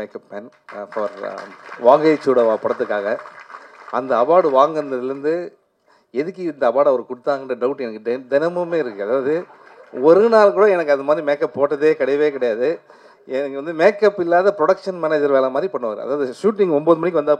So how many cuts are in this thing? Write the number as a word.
zero